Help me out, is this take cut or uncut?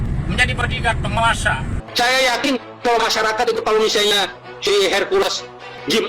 cut